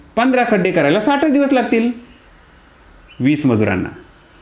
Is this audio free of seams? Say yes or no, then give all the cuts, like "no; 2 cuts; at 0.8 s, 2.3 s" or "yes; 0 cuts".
yes; 0 cuts